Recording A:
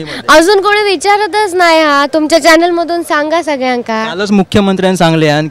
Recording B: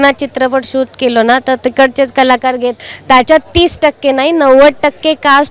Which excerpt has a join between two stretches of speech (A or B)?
B